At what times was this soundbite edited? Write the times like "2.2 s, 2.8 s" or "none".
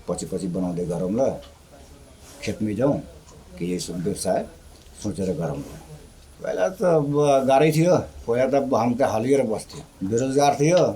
6.3 s

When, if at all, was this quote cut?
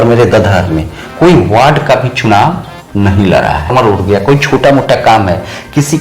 3.7 s

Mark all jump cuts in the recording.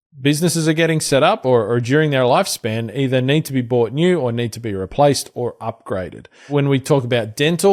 none

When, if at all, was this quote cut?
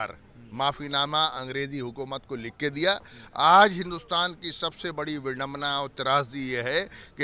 none

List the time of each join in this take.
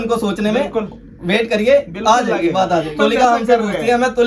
2.9 s

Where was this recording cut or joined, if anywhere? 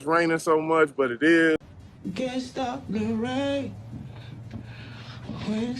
1.6 s

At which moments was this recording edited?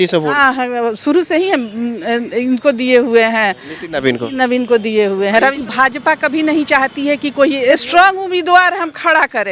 5.6 s, 7.8 s

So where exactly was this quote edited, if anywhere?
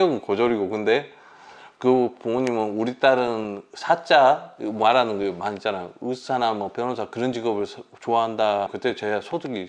none

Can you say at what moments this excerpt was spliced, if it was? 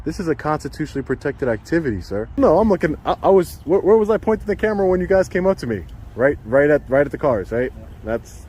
2.4 s

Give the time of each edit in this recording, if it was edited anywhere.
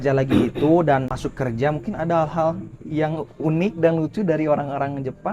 1.2 s

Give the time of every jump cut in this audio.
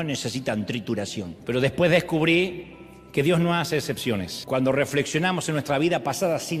1.3 s, 4.3 s

